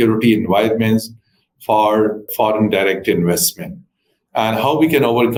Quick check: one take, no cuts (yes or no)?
yes